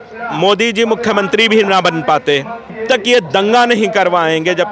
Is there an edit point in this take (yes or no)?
yes